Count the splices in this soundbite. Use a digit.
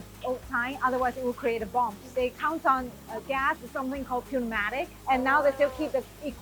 3